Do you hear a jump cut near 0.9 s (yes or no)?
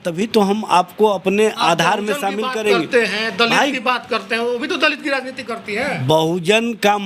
no